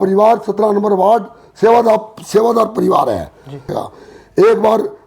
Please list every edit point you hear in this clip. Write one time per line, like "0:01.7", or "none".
0:03.8